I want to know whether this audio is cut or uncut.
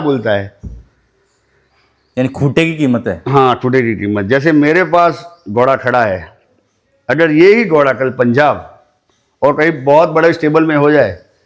uncut